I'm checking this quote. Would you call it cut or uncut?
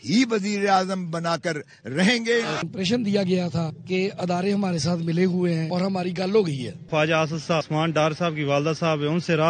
cut